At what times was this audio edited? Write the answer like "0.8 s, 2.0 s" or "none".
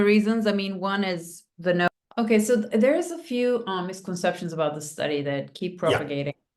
1.9 s